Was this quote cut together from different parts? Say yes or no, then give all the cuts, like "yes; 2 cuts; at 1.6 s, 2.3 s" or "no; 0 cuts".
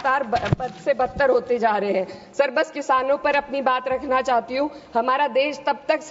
no; 0 cuts